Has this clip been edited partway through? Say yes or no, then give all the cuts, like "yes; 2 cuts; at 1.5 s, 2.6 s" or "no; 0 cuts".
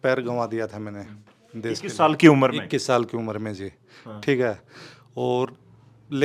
no; 0 cuts